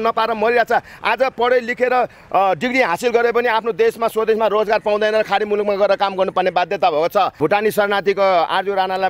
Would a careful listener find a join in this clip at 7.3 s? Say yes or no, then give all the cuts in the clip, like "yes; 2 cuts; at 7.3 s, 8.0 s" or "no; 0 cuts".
yes; 1 cut; at 7.3 s